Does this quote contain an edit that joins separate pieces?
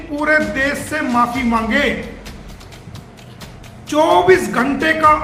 no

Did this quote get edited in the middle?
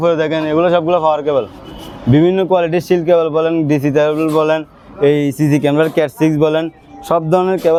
no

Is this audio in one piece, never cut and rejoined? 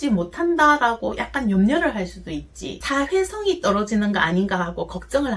no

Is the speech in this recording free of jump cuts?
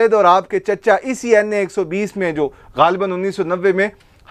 yes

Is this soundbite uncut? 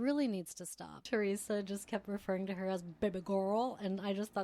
no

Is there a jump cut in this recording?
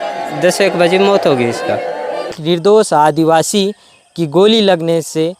yes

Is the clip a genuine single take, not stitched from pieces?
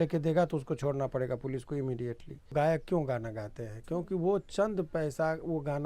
no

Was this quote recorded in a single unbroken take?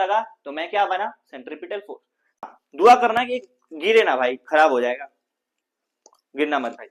no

